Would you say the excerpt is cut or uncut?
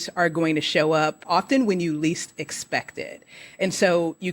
cut